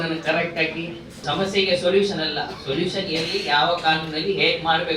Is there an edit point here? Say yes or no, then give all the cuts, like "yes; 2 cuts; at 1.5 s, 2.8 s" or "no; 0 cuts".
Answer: yes; 1 cut; at 1.1 s